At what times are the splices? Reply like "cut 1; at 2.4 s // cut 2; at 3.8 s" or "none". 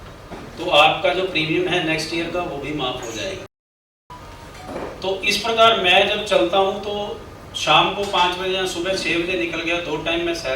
cut 1; at 4.0 s

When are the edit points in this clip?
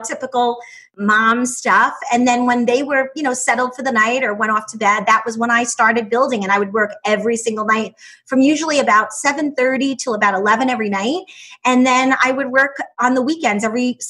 cut 1; at 1.0 s // cut 2; at 13.0 s

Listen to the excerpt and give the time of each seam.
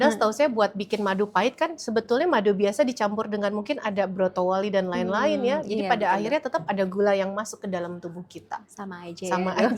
none

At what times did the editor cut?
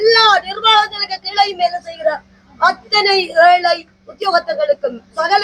none

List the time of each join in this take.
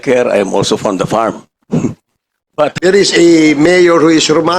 cut 1; at 2.7 s

